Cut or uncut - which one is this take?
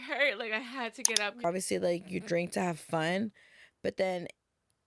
cut